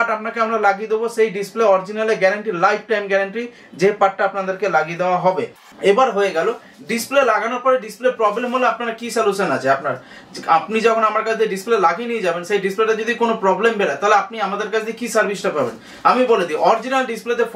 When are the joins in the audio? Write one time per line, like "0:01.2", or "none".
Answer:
none